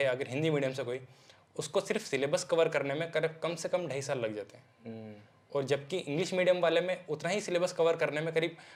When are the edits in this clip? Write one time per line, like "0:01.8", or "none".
none